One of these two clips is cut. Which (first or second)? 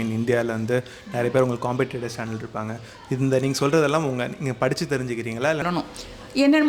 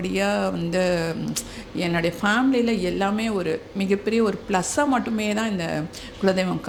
first